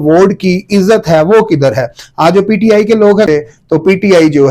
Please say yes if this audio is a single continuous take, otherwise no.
no